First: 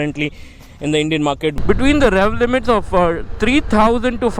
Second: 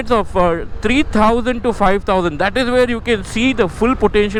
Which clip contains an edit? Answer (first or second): first